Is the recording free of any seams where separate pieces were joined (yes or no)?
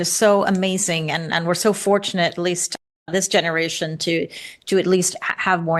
yes